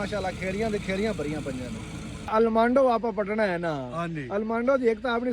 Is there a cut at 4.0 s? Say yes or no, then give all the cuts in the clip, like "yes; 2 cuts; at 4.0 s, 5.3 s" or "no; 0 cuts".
no; 1 cut; at 2.3 s